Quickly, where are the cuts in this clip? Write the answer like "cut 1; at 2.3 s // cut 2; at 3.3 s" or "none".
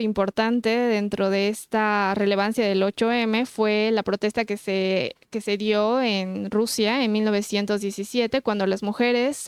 none